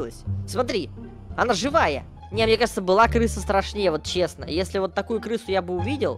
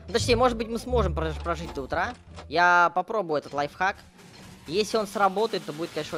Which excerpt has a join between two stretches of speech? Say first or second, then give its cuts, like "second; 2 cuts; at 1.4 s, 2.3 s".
first; 1 cut; at 2.2 s